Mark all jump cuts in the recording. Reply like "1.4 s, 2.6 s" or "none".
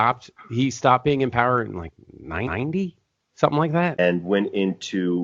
4.0 s